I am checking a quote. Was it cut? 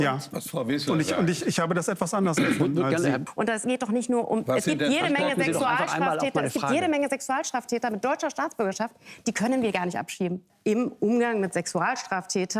yes; 2 cuts; at 3.3 s, 10.4 s

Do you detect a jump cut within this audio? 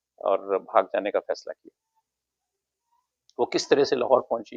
no; 0 cuts

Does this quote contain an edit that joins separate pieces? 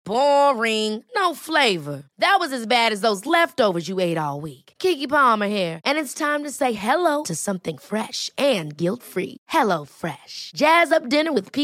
no; 0 cuts

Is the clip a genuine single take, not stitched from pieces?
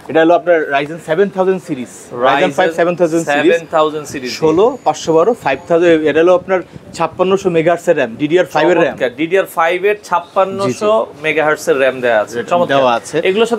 yes; 0 cuts

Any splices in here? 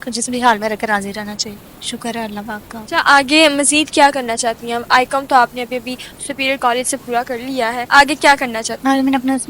no; 0 cuts

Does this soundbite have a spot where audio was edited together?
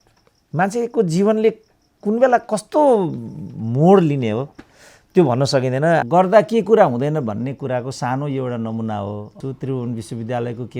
yes; 2 cuts; at 6.0 s, 9.4 s

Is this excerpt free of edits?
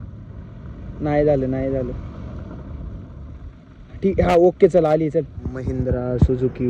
no; 1 cut; at 5.7 s

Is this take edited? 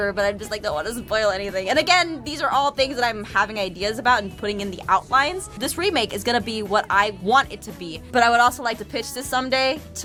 no; 0 cuts

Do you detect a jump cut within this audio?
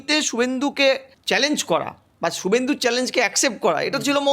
yes; 1 cut; at 1.1 s

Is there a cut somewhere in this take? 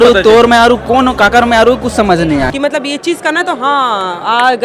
yes; 1 cut; at 2.5 s

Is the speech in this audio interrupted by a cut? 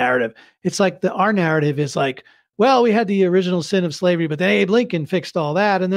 no; 0 cuts

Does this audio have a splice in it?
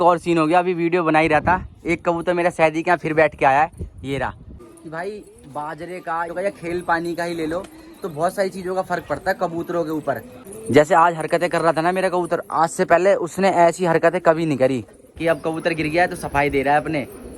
yes; 3 cuts; at 4.7 s, 10.3 s, 15.1 s

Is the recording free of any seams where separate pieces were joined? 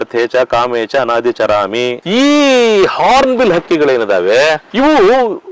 no; 1 cut; at 2.0 s

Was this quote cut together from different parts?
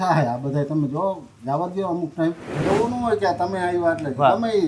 yes; 1 cut; at 2.6 s

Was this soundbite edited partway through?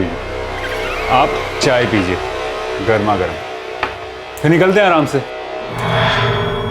yes; 1 cut; at 5.8 s

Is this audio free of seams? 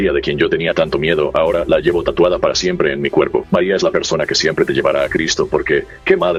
yes; 0 cuts

